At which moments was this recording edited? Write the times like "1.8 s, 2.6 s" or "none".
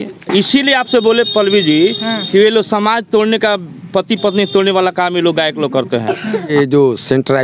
none